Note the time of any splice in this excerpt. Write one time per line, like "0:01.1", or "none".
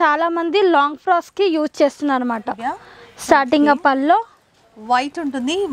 none